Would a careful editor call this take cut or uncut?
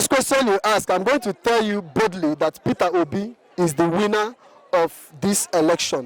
uncut